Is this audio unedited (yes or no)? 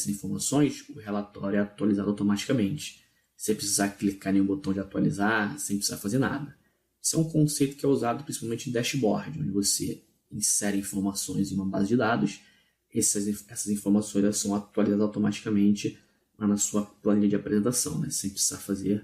no